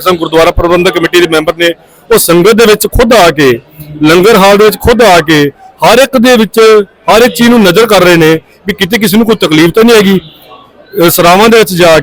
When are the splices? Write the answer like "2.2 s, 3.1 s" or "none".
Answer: none